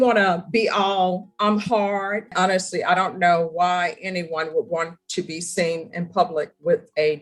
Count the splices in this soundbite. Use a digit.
1